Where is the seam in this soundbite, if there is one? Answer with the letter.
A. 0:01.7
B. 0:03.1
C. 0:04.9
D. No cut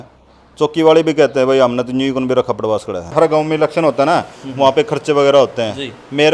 B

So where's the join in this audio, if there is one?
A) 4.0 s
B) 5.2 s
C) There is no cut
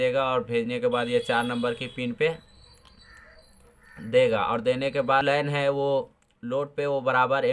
B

